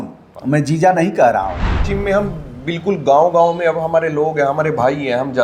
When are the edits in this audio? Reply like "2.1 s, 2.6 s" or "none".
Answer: 1.8 s